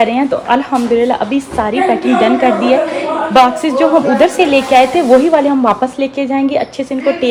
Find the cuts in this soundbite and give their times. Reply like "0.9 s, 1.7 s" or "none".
none